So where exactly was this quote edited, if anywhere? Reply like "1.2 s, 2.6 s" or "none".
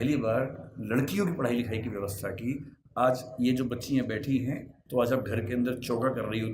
4.7 s

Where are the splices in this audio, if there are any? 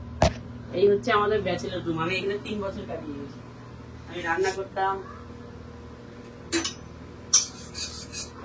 none

